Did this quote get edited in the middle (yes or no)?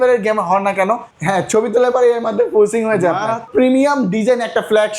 yes